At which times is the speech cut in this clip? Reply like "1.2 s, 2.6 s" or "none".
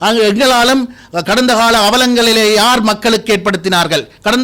none